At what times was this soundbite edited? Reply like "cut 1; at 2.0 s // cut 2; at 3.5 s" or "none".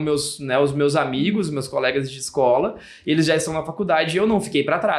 none